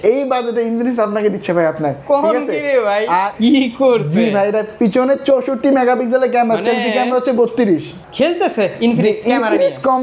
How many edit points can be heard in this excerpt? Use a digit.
2